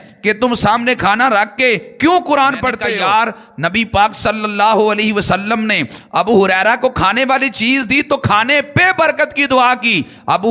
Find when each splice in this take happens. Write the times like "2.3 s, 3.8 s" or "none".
2.8 s